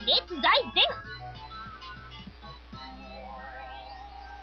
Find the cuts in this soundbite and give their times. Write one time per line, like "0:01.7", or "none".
none